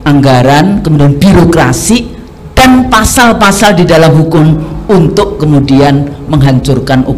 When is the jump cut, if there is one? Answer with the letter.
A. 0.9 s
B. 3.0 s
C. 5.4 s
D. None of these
D